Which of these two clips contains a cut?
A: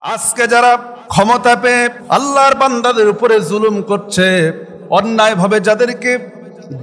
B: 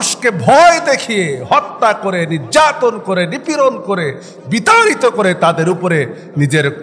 A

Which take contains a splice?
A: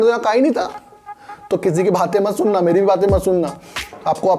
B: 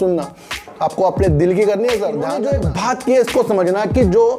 B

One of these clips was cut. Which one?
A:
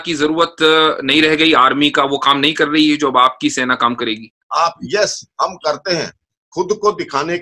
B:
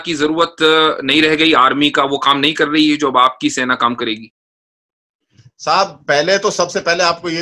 A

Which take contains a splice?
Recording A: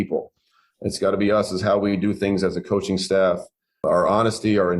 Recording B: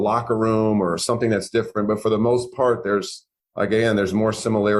A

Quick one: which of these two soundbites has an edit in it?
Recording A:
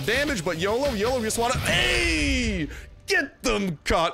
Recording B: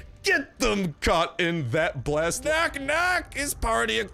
B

